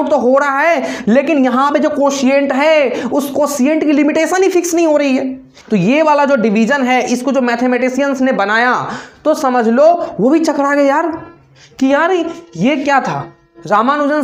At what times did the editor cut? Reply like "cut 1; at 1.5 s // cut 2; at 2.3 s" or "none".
cut 1; at 5.7 s